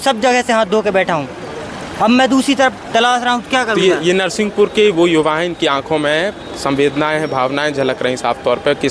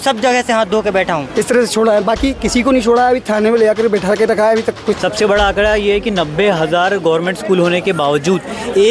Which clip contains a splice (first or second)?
second